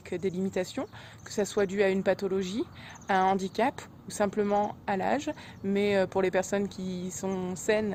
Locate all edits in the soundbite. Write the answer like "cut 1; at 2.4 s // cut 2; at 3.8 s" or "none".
none